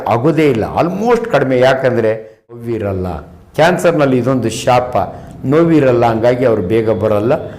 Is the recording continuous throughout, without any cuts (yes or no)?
no